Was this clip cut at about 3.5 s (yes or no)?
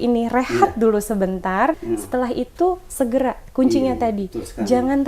no